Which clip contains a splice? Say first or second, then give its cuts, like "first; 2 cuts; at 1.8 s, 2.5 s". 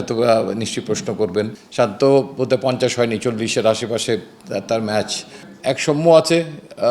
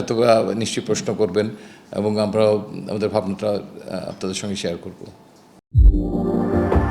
first; 2 cuts; at 1.6 s, 5.5 s